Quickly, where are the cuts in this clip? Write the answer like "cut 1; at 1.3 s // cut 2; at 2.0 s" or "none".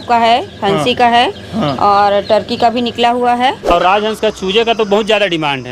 cut 1; at 3.7 s